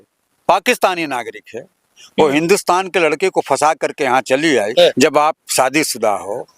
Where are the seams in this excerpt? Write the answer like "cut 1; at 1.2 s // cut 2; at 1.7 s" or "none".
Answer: cut 1; at 4.7 s